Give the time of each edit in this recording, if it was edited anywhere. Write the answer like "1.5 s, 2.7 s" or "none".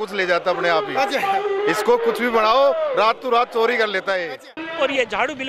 4.5 s